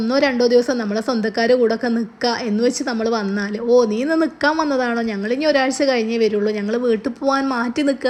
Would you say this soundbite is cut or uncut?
uncut